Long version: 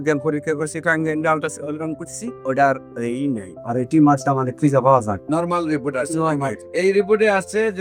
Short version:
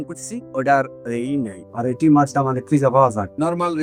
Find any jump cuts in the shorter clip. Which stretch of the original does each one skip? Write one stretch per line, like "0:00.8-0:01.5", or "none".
none

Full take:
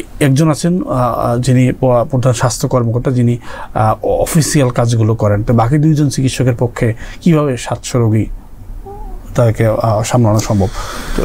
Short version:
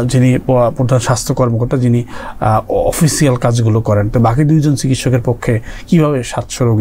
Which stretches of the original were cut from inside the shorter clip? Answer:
none

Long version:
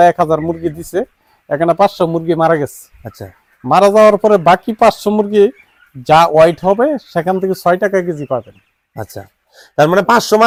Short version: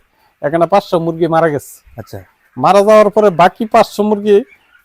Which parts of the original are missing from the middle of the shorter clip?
none

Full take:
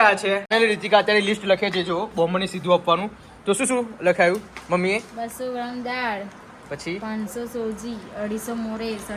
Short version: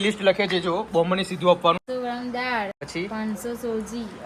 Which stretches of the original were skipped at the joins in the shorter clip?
0:03.1-0:05.4
0:06.3-0:06.7

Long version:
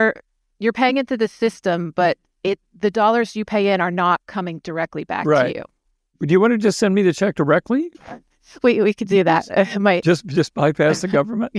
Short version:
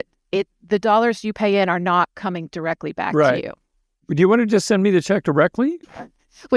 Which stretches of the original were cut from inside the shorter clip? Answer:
none

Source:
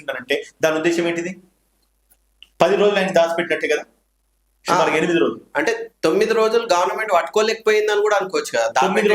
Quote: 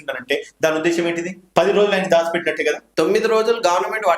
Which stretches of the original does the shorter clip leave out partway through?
0:01.4-0:02.4
0:03.9-0:05.9

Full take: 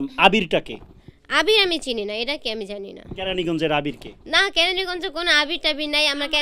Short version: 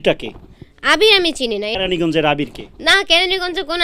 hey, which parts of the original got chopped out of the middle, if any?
0:02.2-0:03.2

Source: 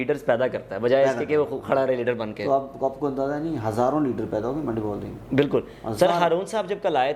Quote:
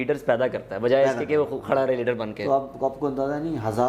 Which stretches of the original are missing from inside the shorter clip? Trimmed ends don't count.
none

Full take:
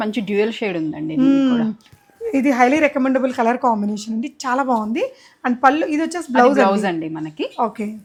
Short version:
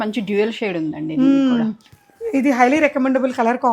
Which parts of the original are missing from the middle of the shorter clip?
none

